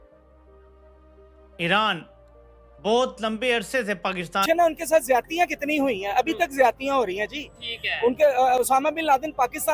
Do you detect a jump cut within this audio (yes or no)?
yes